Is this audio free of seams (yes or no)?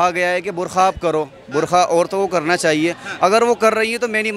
yes